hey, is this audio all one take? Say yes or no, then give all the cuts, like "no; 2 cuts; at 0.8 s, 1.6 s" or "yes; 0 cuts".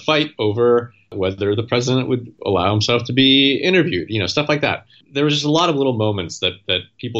no; 3 cuts; at 1.1 s, 2.3 s, 5.0 s